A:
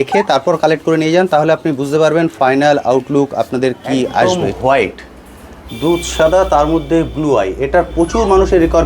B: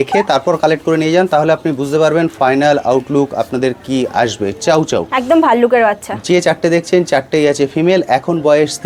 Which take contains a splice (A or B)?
A